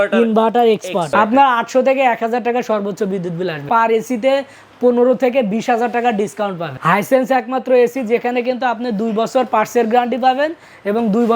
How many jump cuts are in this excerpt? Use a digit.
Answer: 3